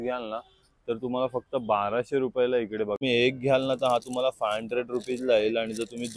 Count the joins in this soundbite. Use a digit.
1